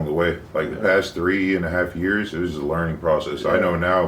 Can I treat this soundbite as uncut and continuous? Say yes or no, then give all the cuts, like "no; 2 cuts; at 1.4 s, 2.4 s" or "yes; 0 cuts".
yes; 0 cuts